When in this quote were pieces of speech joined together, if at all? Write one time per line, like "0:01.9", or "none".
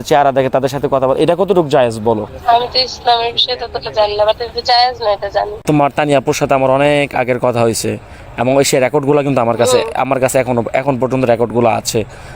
0:02.3
0:05.6